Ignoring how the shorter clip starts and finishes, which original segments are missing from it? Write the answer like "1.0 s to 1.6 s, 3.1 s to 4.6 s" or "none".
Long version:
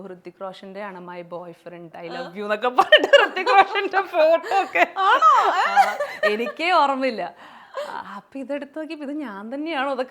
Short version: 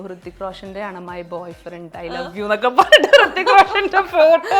none